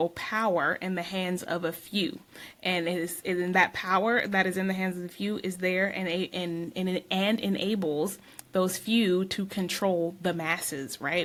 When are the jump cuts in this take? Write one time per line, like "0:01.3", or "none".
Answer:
none

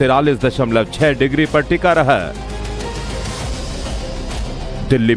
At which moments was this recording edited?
none

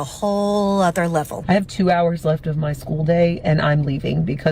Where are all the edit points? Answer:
0:01.3

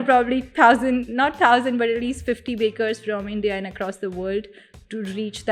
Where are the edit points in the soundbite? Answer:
none

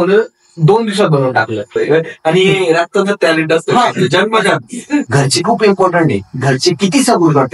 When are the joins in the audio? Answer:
0:01.8
0:05.1

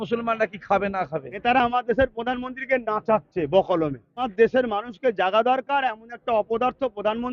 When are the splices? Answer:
0:01.4
0:04.3

